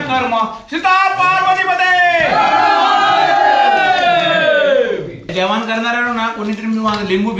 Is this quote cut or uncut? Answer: cut